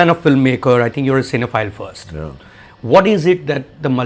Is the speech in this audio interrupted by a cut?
no; 0 cuts

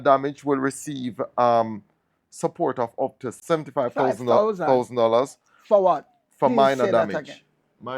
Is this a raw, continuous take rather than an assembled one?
no; 1 cut; at 3.4 s

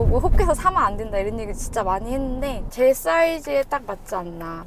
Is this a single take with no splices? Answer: no; 1 cut; at 2.6 s

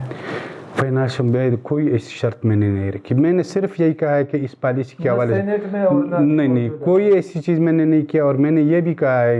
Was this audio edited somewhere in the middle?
no; 0 cuts

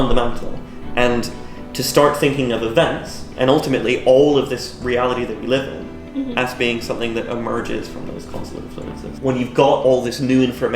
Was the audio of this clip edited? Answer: yes; 1 cut; at 9.1 s

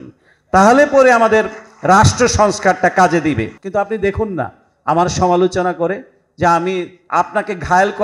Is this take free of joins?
no; 1 cut; at 3.6 s

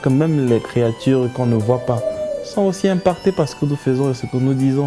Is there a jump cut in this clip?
no; 0 cuts

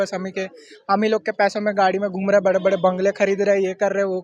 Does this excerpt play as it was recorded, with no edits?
yes; 0 cuts

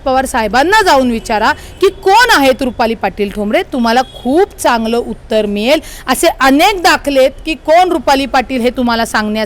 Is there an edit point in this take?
no; 0 cuts

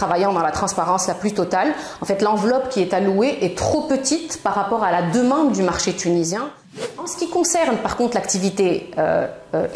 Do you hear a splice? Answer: yes; 1 cut; at 7.1 s

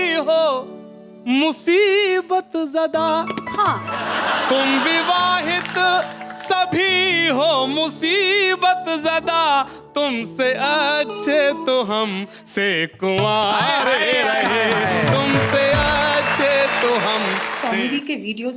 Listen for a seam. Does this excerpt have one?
yes; 1 cut; at 17.5 s

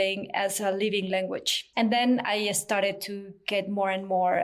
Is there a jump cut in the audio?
yes; 1 cut; at 1.6 s

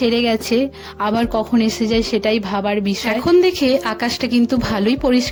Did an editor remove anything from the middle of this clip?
no; 0 cuts

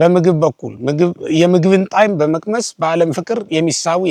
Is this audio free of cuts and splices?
yes; 0 cuts

